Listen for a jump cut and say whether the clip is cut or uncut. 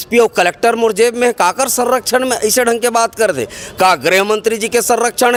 uncut